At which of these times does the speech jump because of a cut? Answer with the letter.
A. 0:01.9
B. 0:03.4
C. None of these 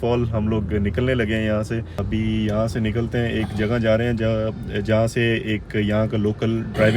A